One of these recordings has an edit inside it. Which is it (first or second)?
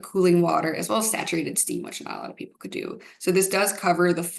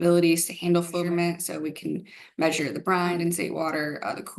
second